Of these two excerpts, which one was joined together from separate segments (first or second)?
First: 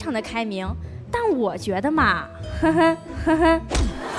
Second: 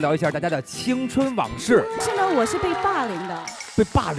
second